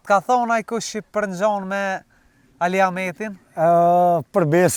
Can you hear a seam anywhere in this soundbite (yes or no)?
no